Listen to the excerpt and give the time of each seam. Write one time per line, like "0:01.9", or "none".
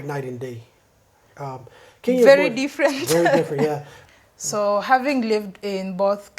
0:03.9